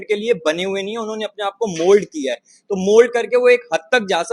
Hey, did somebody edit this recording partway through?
no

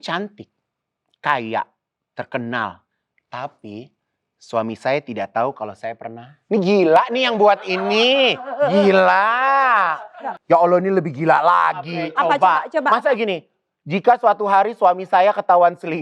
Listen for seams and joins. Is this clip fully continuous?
no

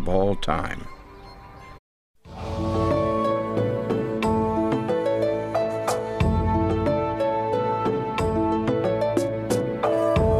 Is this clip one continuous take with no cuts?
yes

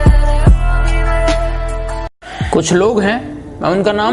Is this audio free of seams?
yes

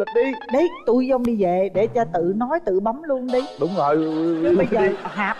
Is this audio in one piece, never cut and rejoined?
yes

